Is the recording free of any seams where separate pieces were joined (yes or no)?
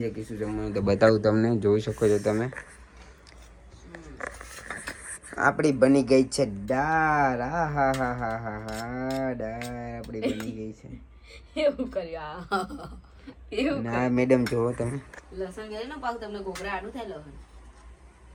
yes